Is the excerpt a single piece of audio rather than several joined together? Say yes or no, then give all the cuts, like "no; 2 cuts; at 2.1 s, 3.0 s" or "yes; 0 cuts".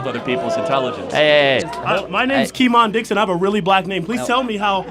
no; 1 cut; at 1.6 s